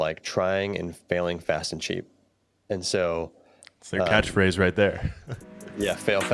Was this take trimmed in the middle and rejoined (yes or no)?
no